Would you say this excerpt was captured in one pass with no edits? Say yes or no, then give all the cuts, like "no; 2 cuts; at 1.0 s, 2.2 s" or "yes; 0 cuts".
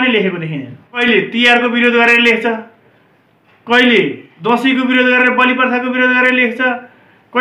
no; 2 cuts; at 1.0 s, 4.3 s